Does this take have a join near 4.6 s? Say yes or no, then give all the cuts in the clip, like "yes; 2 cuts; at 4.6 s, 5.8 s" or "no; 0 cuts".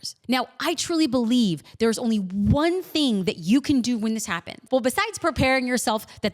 yes; 1 cut; at 4.6 s